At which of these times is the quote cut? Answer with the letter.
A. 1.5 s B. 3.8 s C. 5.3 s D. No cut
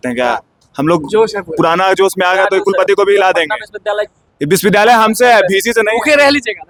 D